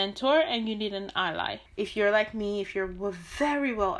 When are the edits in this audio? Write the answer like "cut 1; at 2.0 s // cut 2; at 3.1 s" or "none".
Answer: cut 1; at 1.6 s